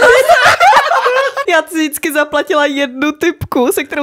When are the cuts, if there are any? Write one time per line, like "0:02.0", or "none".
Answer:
0:01.4